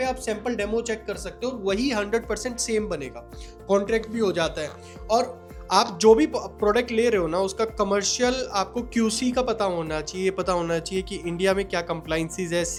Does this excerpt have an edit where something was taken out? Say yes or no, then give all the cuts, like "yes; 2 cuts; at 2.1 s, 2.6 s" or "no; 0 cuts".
no; 0 cuts